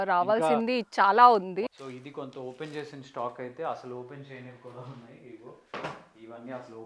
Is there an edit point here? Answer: yes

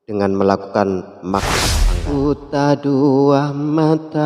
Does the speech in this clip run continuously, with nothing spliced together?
no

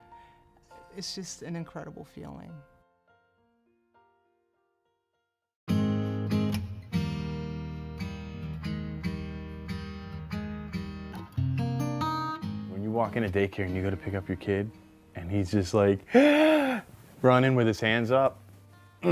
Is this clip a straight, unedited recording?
yes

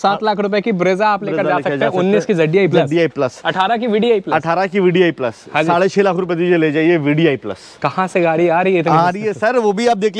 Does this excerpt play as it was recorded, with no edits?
yes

